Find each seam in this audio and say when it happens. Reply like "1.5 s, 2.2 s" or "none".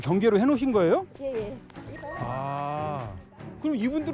2.0 s